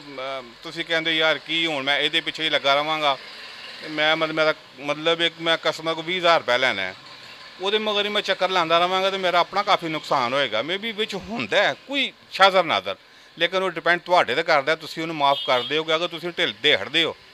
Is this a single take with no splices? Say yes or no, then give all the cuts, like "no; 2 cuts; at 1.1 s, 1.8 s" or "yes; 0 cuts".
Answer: yes; 0 cuts